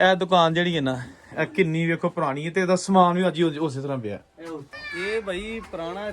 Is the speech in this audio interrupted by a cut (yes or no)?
yes